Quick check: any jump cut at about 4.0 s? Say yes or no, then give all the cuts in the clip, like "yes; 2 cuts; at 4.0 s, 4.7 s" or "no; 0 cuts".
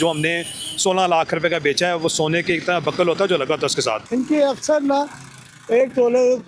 yes; 1 cut; at 4.0 s